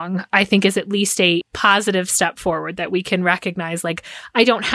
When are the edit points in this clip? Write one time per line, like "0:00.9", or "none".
0:01.5